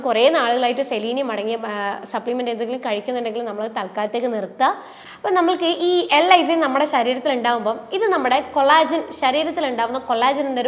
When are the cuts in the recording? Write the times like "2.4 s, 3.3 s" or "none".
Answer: 4.9 s